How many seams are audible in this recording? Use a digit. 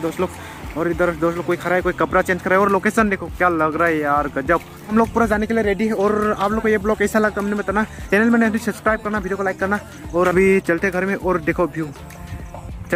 0